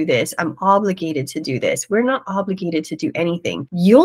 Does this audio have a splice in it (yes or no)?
no